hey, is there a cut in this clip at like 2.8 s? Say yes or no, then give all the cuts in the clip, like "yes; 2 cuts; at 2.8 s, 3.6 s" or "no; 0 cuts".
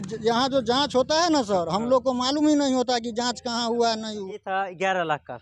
no; 1 cut; at 4.4 s